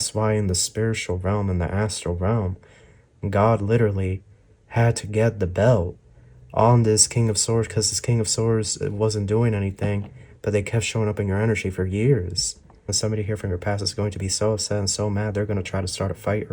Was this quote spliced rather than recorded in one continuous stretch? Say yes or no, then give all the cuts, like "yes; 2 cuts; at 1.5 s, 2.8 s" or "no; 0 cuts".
yes; 1 cut; at 13.0 s